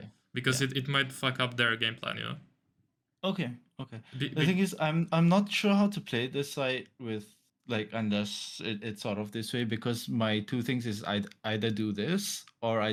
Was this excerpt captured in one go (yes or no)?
yes